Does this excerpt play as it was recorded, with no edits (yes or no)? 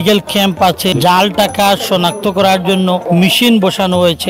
no